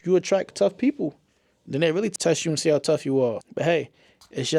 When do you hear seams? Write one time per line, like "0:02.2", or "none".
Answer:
none